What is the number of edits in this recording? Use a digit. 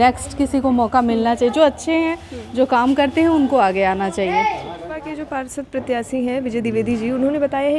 1